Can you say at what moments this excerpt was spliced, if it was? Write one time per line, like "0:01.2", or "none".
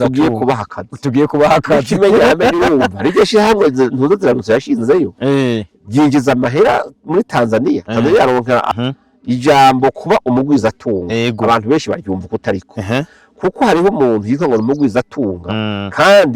0:08.7